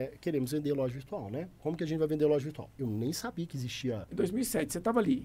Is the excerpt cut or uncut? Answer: cut